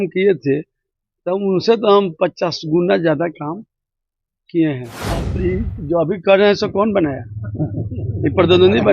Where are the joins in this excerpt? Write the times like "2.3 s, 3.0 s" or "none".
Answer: 5.3 s